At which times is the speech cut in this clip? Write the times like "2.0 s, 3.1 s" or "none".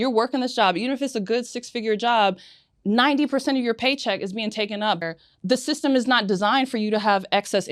5.0 s